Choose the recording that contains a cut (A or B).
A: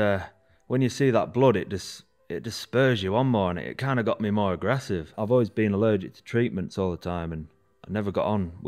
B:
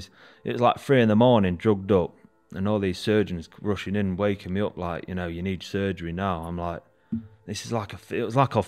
A